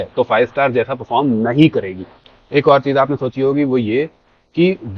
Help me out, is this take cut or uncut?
uncut